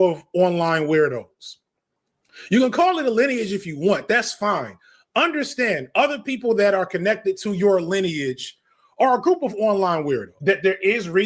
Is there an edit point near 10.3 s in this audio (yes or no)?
yes